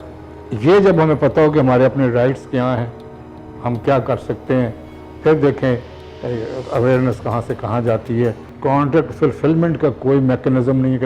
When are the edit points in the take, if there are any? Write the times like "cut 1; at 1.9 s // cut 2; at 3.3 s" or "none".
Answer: cut 1; at 8.5 s